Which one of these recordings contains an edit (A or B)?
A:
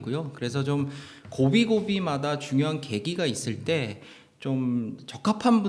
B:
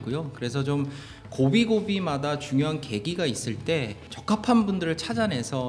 B